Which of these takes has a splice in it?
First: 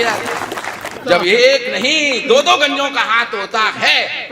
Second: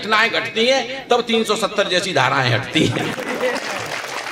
first; 1 cut; at 1.0 s

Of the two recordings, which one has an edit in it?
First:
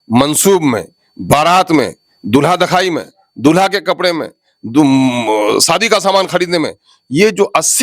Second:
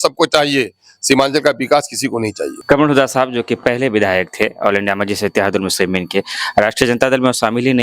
second; 1 cut; at 2.5 s

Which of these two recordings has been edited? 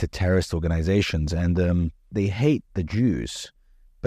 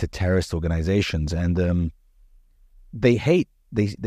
first; 1 cut; at 2.1 s

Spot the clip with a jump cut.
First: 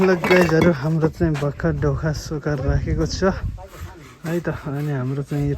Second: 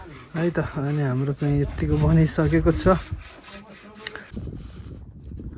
second; 1 cut; at 4.3 s

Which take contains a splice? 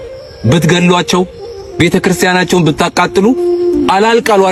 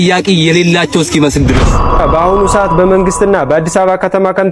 second; 1 cut; at 2.0 s

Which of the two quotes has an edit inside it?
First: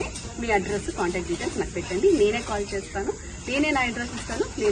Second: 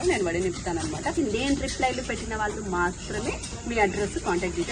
second; 1 cut; at 1.1 s

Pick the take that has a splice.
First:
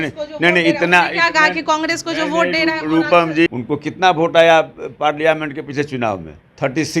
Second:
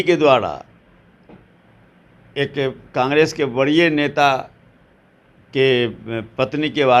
first; 1 cut; at 3.5 s

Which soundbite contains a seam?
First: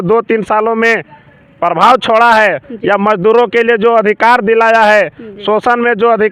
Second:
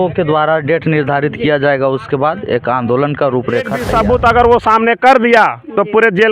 second; 1 cut; at 3.8 s

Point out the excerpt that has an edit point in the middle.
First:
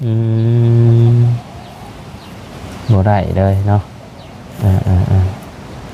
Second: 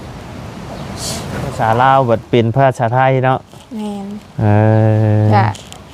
second; 1 cut; at 1.5 s

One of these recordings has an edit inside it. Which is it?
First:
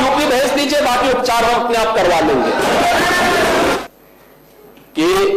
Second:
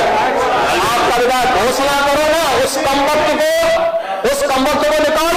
first; 1 cut; at 3.8 s

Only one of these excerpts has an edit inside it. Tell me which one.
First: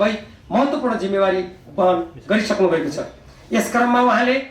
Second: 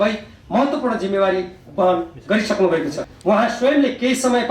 second; 1 cut; at 3.1 s

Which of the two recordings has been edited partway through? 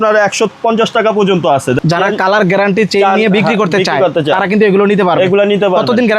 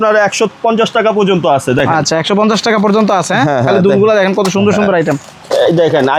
first; 1 cut; at 1.8 s

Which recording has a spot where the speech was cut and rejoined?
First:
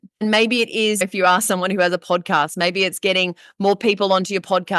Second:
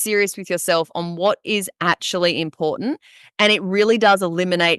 first; 1 cut; at 1.0 s

